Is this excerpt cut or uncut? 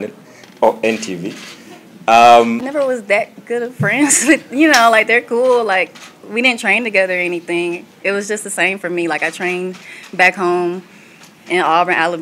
cut